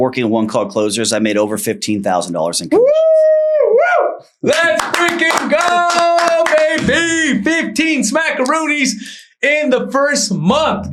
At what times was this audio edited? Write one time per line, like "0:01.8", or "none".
none